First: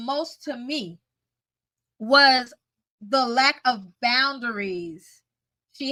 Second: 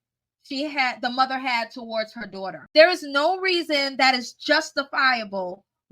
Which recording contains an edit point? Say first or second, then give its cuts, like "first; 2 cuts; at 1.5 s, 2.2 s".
second; 1 cut; at 2.6 s